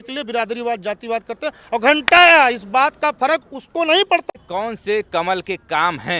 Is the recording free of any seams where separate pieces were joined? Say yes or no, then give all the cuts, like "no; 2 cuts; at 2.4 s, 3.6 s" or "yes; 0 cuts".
no; 1 cut; at 4.2 s